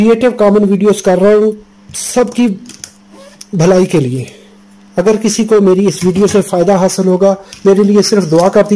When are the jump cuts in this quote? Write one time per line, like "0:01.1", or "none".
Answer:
0:07.5